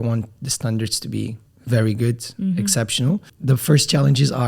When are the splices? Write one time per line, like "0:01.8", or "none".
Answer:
0:01.5
0:03.3